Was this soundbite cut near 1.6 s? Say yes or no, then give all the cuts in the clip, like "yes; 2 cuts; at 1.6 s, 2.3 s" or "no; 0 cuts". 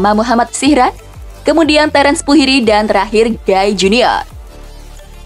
no; 1 cut; at 4.3 s